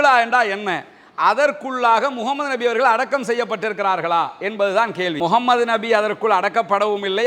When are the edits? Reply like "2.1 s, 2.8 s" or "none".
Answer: 5.2 s